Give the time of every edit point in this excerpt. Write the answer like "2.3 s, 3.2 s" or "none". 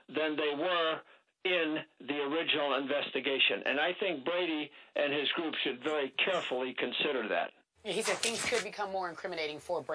5.9 s